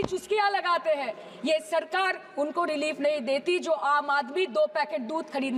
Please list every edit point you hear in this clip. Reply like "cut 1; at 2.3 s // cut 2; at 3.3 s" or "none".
none